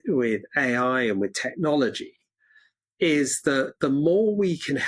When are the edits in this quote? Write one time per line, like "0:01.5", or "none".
none